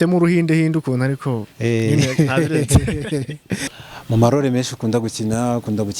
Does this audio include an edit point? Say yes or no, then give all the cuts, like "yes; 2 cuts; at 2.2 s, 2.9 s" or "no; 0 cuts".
yes; 1 cut; at 3.7 s